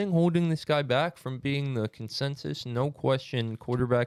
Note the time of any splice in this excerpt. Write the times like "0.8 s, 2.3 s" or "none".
none